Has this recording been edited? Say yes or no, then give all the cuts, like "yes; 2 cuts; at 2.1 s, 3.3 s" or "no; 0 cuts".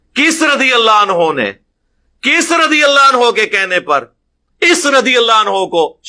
no; 0 cuts